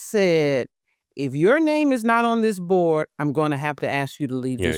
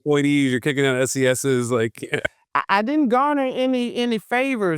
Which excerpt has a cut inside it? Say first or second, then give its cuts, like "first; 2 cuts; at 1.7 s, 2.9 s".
second; 1 cut; at 2.3 s